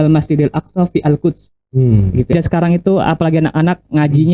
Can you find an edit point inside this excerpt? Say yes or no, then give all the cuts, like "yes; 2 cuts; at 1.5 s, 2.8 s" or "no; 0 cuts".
yes; 1 cut; at 2.3 s